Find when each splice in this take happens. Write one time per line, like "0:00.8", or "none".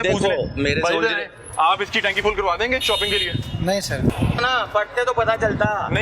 0:04.1

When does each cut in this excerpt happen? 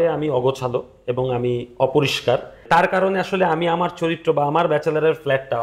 0:02.6

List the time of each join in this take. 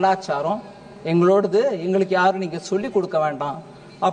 none

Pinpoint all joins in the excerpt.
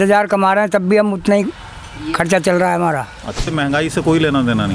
0:03.5

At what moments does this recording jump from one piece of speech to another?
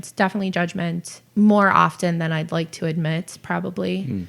0:01.2

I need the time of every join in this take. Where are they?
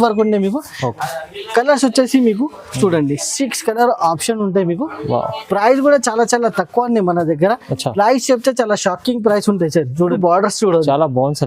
0:10.1

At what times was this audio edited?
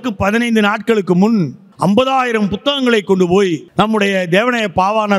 0:01.6
0:03.7

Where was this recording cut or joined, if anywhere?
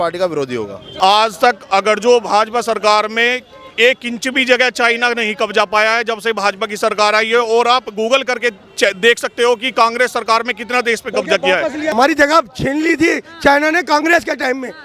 0:00.9
0:11.9

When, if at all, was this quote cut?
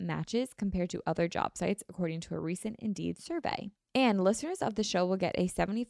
0:03.7

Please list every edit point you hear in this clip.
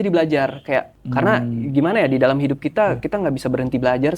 0:01.0

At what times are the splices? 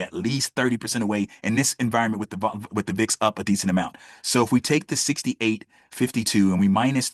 none

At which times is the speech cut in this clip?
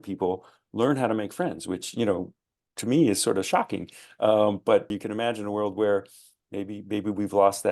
0:04.9

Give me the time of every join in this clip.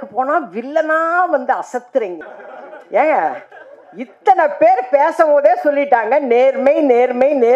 0:02.2

